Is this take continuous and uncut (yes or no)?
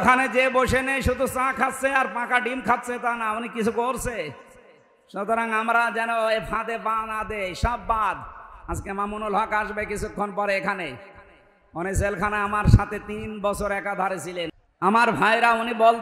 no